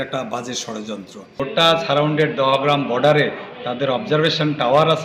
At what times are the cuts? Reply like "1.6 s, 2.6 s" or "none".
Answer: 1.4 s